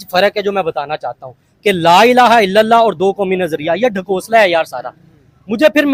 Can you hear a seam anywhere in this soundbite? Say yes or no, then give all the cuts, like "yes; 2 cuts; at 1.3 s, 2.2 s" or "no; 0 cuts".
no; 0 cuts